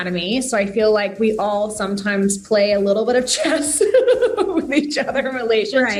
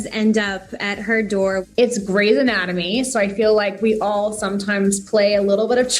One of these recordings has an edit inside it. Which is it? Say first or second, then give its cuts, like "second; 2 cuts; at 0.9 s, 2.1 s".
second; 1 cut; at 1.6 s